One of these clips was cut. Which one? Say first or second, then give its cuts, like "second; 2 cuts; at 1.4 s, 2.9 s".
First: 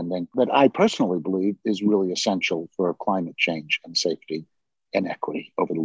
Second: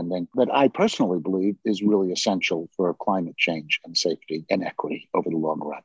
second; 1 cut; at 4.4 s